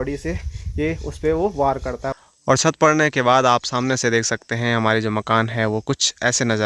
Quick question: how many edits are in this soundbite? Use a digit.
1